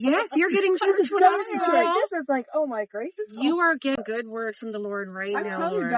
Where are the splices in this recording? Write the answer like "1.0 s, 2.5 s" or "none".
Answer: 4.0 s